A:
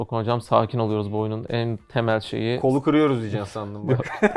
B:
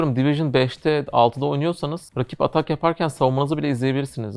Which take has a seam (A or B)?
B